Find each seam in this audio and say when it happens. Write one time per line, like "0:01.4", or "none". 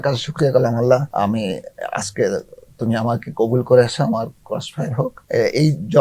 0:01.1
0:05.2